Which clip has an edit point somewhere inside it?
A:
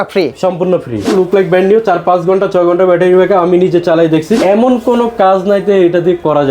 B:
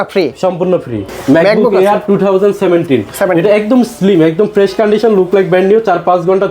A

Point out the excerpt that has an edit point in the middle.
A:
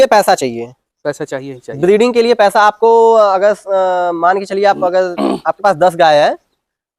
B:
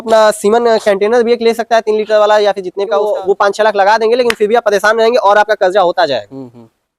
B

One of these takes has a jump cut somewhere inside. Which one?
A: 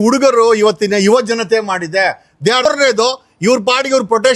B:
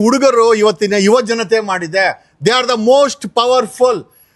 A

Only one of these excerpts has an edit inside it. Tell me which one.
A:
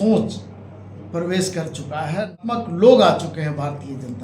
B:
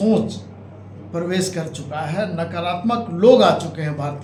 A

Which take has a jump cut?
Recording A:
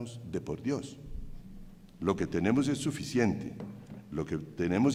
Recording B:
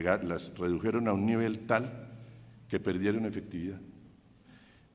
B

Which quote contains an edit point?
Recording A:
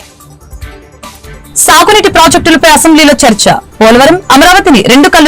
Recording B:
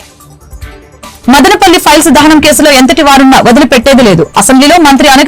A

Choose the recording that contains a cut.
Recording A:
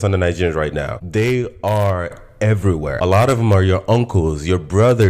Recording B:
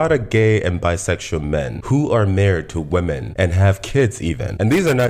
A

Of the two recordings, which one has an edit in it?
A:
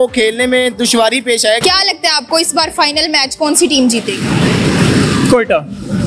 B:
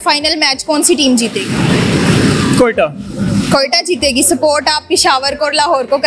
A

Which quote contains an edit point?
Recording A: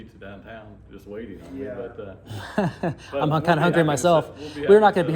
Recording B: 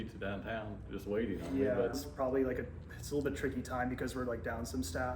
B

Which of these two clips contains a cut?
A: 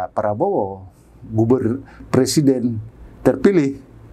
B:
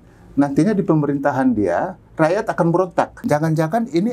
B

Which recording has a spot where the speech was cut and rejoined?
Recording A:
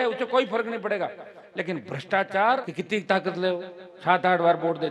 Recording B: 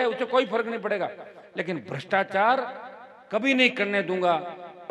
A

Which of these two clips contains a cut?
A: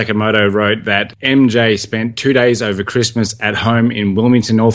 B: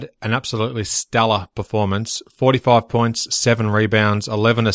A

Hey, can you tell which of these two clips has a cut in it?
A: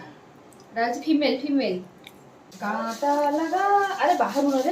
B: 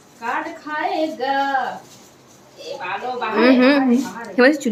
A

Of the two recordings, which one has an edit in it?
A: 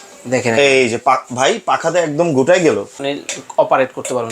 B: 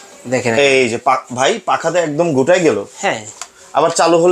A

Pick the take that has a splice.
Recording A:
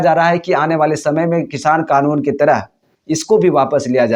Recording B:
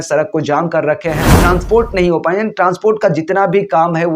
B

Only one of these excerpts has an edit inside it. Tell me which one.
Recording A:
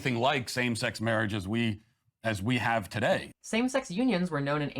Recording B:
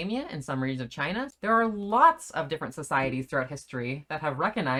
A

